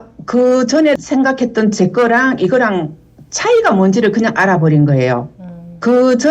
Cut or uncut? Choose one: cut